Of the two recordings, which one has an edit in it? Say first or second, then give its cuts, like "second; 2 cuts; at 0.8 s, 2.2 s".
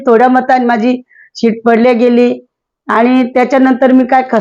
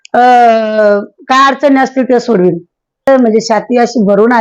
second; 1 cut; at 3.1 s